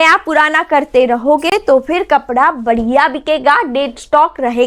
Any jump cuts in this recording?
no; 0 cuts

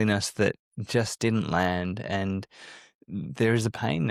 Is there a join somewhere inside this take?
no; 0 cuts

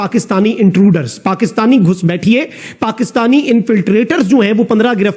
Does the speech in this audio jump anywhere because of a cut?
no; 0 cuts

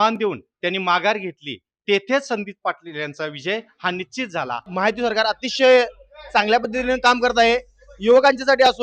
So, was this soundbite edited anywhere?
yes; 1 cut; at 4.7 s

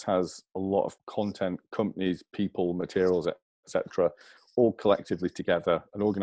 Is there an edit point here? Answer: yes; 1 cut; at 1.0 s

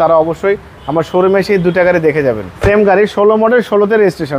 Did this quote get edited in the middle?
yes; 1 cut; at 2.5 s

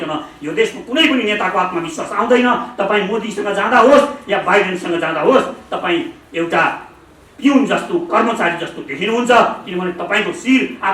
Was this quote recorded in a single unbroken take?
yes; 0 cuts

